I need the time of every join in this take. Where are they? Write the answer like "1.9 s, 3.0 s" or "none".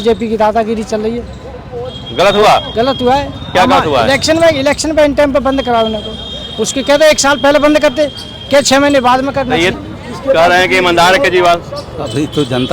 9.7 s

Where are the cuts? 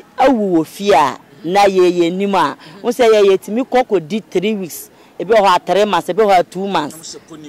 none

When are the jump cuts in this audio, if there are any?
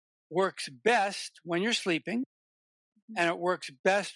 none

